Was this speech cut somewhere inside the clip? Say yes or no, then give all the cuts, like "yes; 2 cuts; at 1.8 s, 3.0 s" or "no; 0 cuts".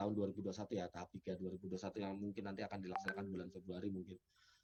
no; 0 cuts